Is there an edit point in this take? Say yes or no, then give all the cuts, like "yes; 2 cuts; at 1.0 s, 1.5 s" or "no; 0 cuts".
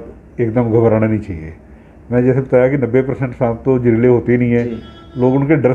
no; 0 cuts